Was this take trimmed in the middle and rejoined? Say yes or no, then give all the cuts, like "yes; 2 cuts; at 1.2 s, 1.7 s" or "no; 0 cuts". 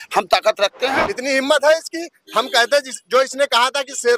yes; 1 cut; at 1.0 s